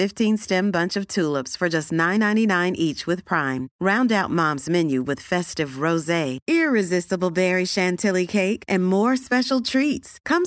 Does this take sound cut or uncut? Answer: uncut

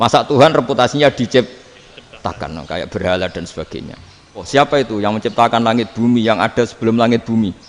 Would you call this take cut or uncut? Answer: cut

